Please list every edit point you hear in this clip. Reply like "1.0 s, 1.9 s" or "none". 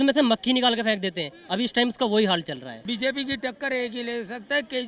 2.8 s